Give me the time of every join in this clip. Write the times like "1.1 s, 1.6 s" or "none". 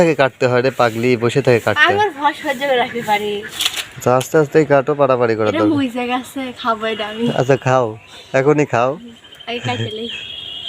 3.5 s